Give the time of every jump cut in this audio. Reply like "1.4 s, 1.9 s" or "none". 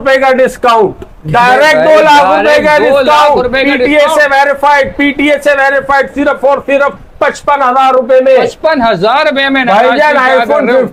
none